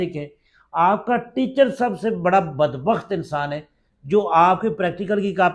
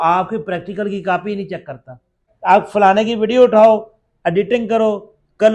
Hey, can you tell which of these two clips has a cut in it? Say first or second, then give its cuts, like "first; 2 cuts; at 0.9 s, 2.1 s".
second; 1 cut; at 2.2 s